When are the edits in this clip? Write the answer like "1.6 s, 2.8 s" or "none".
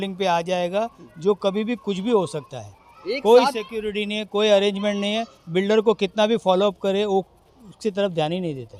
none